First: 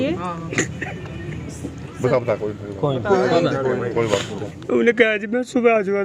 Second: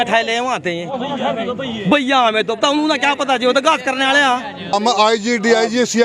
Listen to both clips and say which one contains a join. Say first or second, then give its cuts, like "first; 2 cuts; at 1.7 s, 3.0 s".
second; 1 cut; at 4.7 s